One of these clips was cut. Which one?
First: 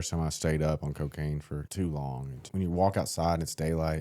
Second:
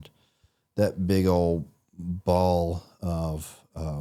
first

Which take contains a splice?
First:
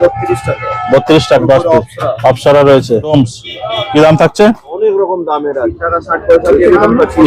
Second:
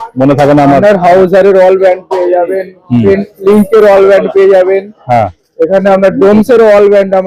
first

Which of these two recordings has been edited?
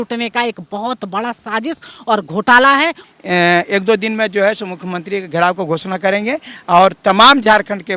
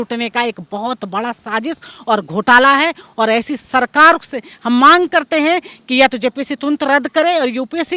first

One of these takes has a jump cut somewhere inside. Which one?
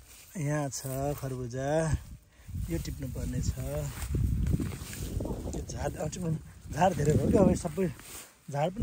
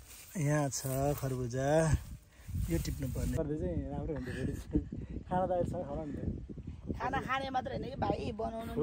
second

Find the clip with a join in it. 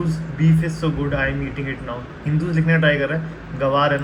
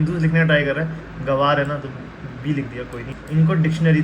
second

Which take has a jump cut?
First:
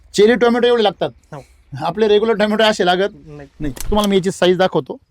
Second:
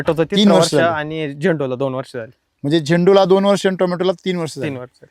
first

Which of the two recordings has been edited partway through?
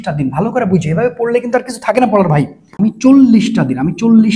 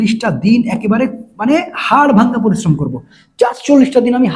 first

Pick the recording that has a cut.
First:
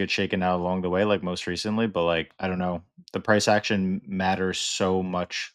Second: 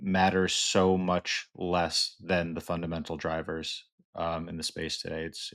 first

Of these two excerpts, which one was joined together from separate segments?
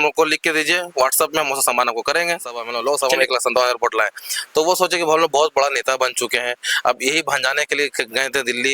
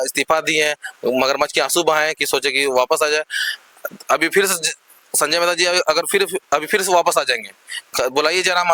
first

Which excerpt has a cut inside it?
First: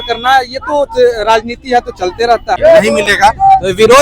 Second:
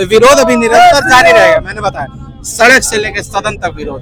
first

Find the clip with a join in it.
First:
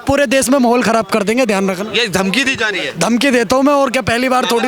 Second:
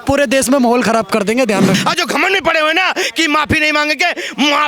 second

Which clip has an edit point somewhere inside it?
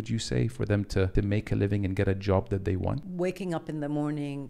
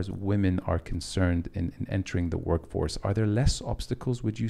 first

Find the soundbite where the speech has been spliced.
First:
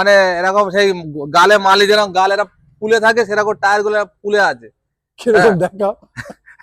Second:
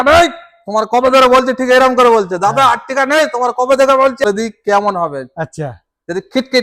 second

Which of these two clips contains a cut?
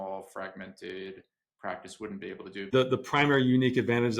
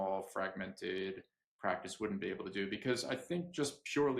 first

